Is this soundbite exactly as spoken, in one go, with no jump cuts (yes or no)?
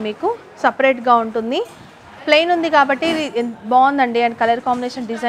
yes